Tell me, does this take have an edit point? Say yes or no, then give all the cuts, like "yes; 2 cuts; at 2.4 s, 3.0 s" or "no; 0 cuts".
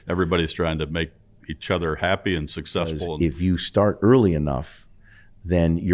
yes; 1 cut; at 3.1 s